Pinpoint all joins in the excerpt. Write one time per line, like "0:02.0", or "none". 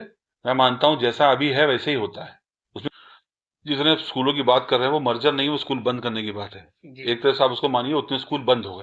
0:02.9